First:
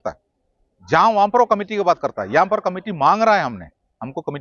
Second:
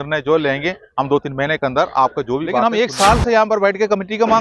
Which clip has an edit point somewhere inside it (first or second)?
second